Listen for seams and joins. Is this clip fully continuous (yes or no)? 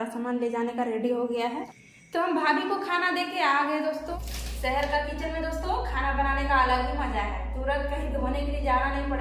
no